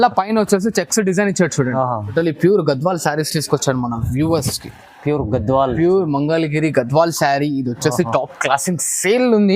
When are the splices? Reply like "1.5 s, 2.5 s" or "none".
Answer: 2.1 s